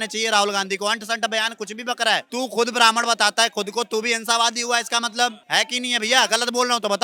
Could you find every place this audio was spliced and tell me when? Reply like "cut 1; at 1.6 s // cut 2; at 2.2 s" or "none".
none